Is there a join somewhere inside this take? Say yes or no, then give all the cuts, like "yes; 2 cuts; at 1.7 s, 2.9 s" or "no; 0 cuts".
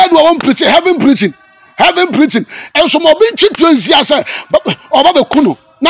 no; 0 cuts